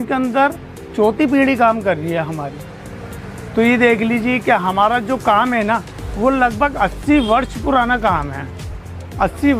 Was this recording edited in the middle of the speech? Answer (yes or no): no